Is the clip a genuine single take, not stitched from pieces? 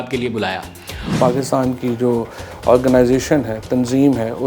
no; 1 cut; at 1.1 s

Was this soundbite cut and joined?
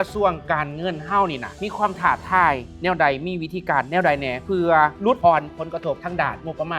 yes; 1 cut; at 1.6 s

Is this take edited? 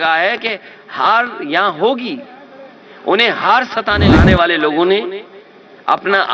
yes; 1 cut; at 4.1 s

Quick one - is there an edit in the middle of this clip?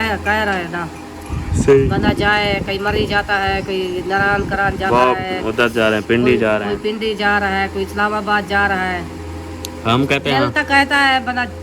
no; 0 cuts

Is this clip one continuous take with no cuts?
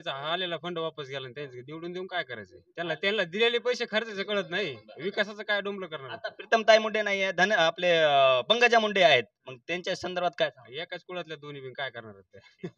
yes; 0 cuts

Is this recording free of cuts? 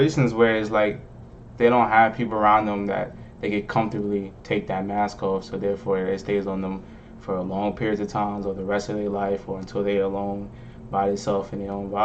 yes; 0 cuts

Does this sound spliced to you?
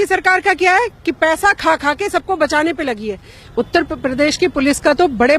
yes; 1 cut; at 3.5 s

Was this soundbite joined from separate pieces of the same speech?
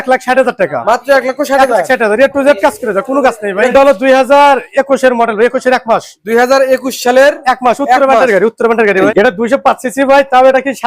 yes; 2 cuts; at 3.7 s, 9.1 s

